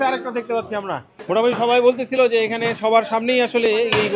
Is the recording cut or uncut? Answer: uncut